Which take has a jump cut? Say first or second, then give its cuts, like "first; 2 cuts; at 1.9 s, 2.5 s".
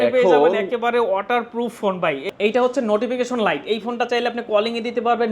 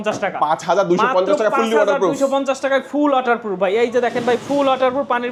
first; 1 cut; at 2.4 s